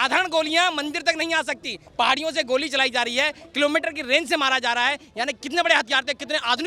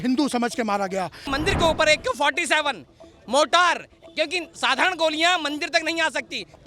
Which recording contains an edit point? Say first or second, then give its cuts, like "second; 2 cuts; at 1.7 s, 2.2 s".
second; 1 cut; at 1.2 s